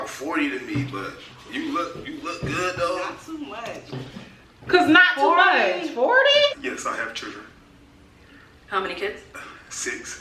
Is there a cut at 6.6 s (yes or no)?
yes